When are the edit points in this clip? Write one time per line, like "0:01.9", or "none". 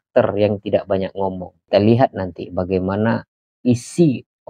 0:01.5